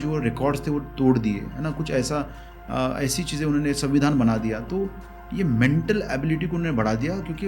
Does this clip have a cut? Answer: no; 0 cuts

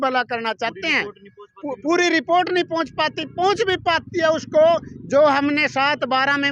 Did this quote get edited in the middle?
no; 0 cuts

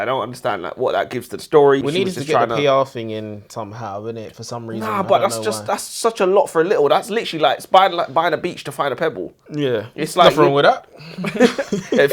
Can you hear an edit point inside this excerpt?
yes; 1 cut; at 1.8 s

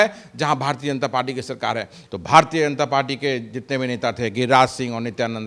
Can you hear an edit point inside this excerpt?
yes; 1 cut; at 1.9 s

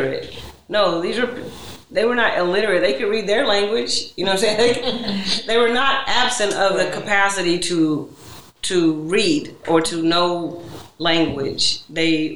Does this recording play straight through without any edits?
yes; 0 cuts

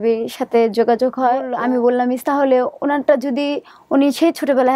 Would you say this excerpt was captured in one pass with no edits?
no; 1 cut; at 1.5 s

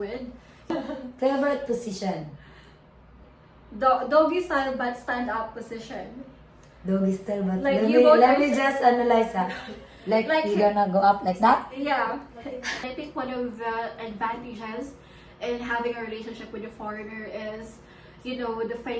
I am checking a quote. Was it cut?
yes; 3 cuts; at 0.7 s, 3.3 s, 12.8 s

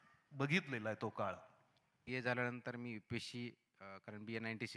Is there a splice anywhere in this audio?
yes; 1 cut; at 1.9 s

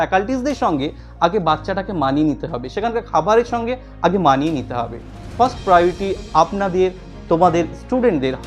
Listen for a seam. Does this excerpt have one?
no; 0 cuts

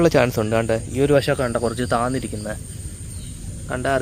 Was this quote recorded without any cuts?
yes; 0 cuts

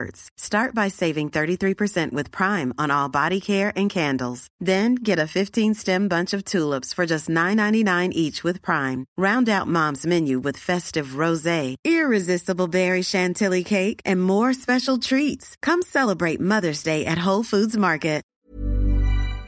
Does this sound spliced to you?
yes; 1 cut; at 18.3 s

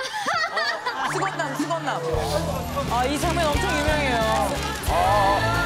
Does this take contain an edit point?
yes; 1 cut; at 2.2 s

